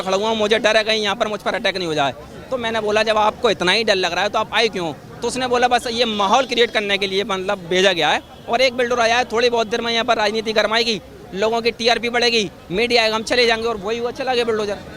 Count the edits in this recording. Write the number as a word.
zero